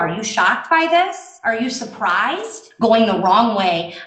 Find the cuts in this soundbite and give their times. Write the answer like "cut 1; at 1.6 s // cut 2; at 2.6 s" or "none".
cut 1; at 1.3 s // cut 2; at 2.6 s